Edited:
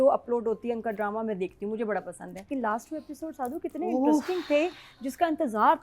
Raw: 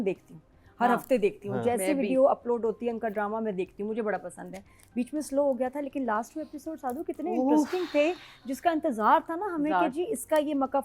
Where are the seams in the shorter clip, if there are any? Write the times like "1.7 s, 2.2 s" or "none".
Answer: 2.4 s